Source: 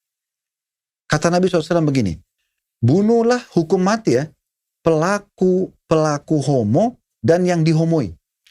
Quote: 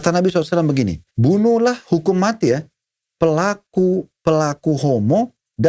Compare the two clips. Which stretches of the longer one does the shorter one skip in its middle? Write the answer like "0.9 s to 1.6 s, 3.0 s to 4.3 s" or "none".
2.2 s to 2.7 s